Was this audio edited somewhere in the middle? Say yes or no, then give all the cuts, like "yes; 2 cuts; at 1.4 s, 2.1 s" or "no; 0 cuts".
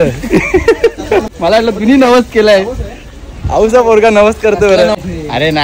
yes; 2 cuts; at 1.3 s, 4.9 s